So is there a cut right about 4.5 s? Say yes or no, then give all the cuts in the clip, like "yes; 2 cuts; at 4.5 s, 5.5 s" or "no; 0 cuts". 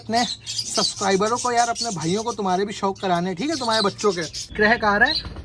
yes; 1 cut; at 4.5 s